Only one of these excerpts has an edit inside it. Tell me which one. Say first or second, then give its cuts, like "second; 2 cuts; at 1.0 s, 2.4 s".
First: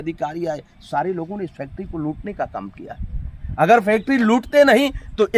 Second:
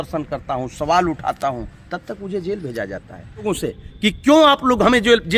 second; 1 cut; at 3.5 s